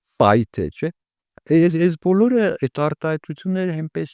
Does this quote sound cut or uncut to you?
uncut